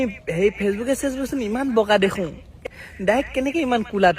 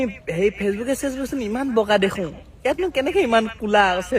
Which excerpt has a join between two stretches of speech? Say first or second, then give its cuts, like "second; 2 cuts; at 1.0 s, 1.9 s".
first; 1 cut; at 2.5 s